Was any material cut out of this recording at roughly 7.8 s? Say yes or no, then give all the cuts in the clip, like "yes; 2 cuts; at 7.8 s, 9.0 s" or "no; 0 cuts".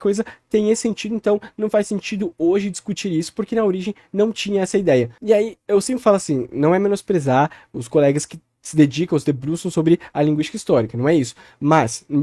no; 0 cuts